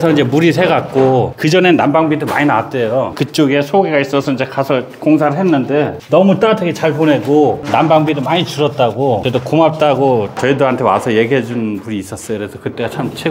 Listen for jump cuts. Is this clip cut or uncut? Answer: uncut